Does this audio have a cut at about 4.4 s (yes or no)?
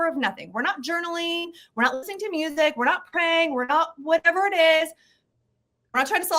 no